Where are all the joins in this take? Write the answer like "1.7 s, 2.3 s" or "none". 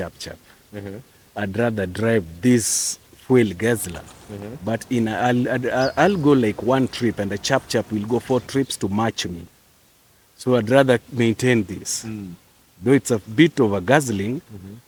none